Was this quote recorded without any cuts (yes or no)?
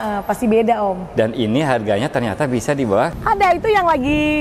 no